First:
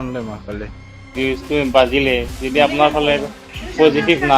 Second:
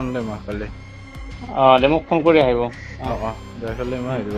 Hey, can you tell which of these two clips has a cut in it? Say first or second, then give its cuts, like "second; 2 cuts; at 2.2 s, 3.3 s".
first; 1 cut; at 1.1 s